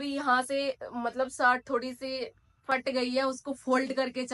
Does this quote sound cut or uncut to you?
uncut